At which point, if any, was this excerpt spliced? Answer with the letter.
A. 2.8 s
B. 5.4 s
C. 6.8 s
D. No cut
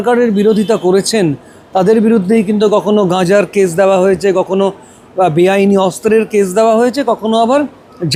D